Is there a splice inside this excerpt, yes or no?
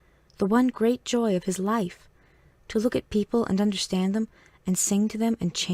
no